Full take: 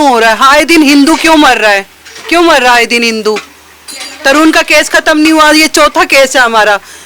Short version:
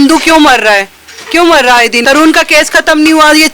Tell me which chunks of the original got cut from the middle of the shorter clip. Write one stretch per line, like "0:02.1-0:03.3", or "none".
0:03.0-0:04.2